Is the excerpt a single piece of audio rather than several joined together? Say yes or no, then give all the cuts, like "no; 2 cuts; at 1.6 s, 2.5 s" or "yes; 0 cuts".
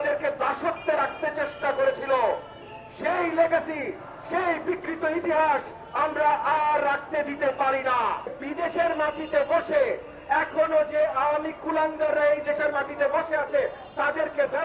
no; 1 cut; at 8.4 s